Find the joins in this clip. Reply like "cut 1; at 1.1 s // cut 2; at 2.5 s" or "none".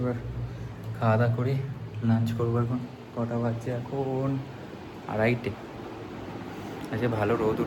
none